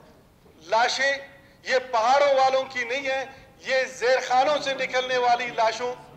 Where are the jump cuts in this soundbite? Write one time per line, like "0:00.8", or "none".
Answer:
none